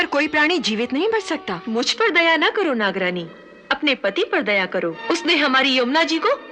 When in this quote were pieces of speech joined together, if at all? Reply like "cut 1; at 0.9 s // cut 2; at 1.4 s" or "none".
cut 1; at 1.6 s // cut 2; at 5.0 s